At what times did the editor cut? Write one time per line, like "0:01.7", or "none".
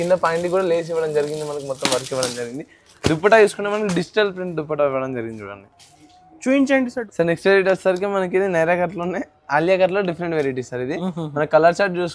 0:07.0